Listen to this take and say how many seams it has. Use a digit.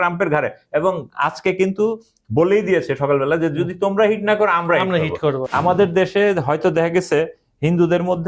1